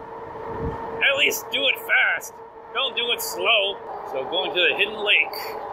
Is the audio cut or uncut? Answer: cut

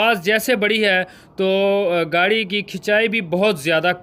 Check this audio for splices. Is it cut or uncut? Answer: uncut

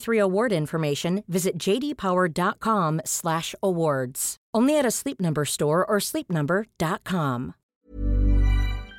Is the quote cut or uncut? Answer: cut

